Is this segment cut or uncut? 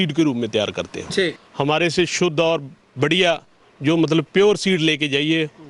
cut